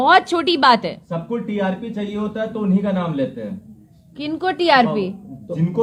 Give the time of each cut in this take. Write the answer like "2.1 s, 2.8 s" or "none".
none